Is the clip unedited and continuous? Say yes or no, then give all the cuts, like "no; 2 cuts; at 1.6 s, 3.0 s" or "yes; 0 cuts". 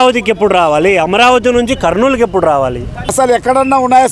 no; 1 cut; at 3.1 s